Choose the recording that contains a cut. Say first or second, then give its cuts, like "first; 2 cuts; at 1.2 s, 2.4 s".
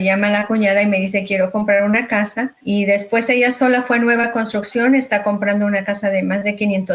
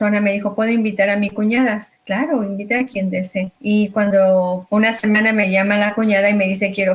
first; 1 cut; at 2.6 s